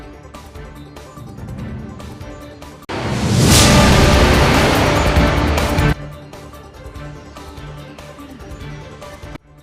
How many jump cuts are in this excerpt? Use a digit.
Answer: 0